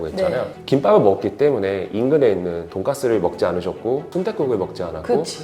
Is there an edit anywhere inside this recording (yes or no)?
yes